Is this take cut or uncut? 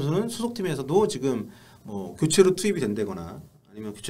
uncut